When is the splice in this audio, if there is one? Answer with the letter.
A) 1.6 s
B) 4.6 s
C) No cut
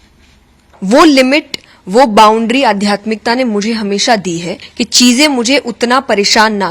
B